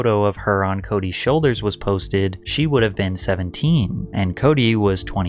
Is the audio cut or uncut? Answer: uncut